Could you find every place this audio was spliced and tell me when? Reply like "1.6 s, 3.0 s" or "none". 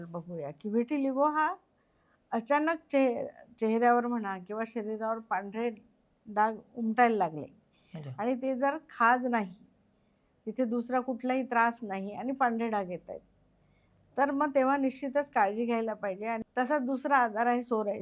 16.4 s